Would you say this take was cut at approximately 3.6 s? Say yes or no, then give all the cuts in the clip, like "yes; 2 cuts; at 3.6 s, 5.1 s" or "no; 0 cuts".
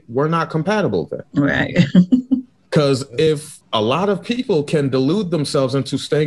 yes; 1 cut; at 3.6 s